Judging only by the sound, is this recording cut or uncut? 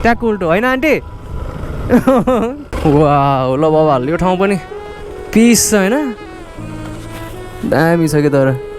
cut